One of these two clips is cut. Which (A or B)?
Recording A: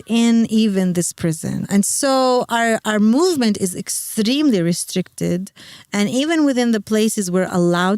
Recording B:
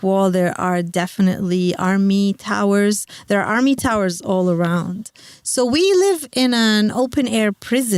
A